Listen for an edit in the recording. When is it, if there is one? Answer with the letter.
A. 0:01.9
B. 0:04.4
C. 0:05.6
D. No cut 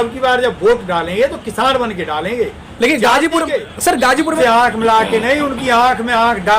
B